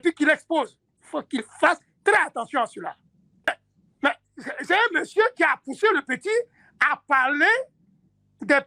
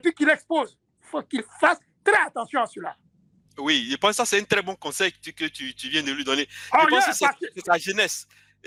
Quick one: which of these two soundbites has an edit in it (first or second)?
first